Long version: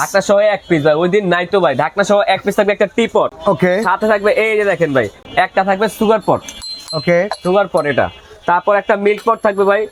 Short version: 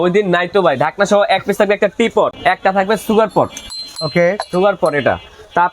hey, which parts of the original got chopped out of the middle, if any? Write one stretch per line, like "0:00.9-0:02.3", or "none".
0:03.3-0:05.3